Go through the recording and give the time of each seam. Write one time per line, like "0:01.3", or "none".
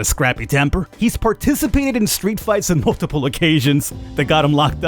0:00.9